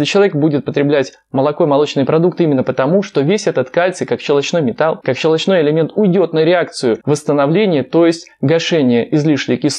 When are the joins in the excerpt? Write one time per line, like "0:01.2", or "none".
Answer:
0:05.0
0:07.0